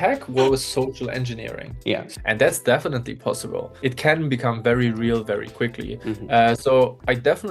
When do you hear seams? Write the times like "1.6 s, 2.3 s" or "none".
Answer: 2.1 s, 3.7 s